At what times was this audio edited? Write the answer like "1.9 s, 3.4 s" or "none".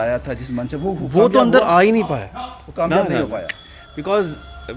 none